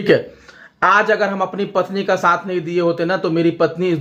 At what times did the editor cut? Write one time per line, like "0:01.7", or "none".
none